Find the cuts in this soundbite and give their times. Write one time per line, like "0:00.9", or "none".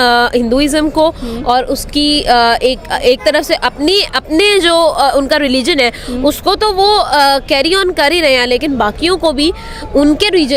none